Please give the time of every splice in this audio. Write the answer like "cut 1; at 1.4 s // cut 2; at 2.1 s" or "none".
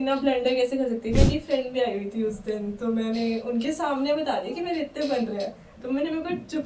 cut 1; at 1.2 s